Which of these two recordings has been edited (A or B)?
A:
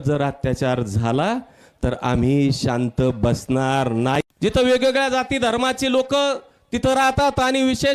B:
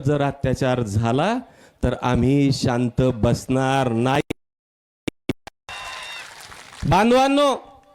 A